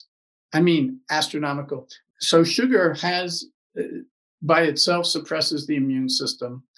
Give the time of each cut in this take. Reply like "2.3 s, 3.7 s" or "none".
1.9 s